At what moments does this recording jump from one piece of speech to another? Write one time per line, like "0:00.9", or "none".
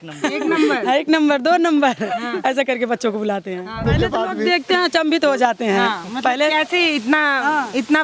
0:03.9

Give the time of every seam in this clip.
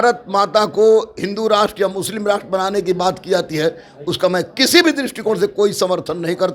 none

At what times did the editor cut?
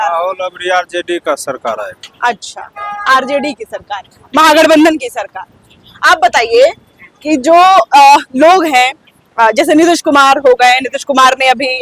none

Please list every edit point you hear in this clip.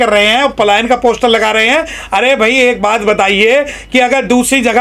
none

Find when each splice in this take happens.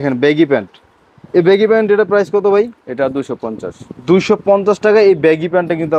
none

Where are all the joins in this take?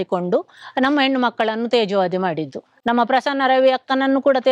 none

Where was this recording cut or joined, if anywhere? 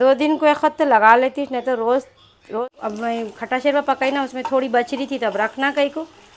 0:02.6

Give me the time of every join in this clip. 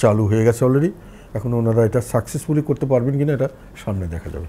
none

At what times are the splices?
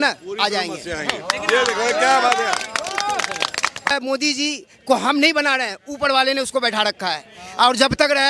0:03.9

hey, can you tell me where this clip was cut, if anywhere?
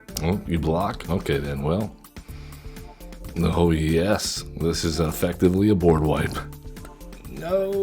0:01.0
0:03.2

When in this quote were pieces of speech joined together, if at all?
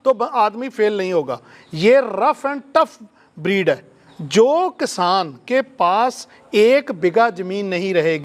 0:04.0

